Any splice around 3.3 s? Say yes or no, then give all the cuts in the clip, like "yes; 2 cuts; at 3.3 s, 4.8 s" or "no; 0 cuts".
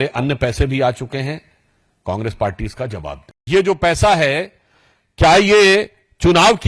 yes; 1 cut; at 3.3 s